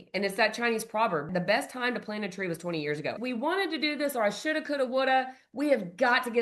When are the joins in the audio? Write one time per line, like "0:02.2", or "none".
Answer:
0:01.3
0:03.2